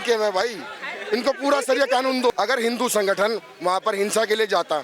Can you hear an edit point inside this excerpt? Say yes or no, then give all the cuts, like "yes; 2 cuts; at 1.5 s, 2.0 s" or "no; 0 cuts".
yes; 1 cut; at 2.3 s